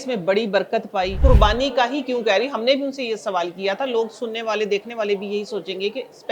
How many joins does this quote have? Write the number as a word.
one